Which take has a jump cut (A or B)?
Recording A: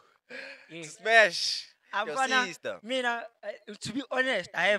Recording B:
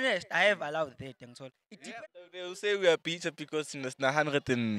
B